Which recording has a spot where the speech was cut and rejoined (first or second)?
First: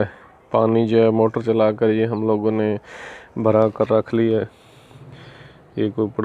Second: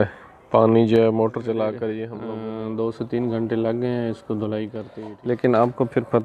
second